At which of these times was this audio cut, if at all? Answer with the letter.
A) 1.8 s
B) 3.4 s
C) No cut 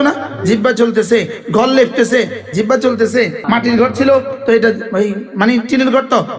B